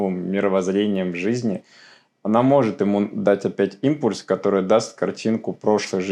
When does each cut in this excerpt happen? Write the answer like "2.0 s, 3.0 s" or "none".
none